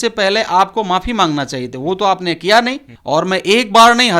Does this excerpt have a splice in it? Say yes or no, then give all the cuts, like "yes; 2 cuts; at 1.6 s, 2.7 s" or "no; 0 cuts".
yes; 1 cut; at 2.9 s